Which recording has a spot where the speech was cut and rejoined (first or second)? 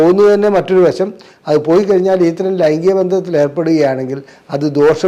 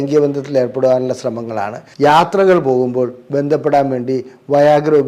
second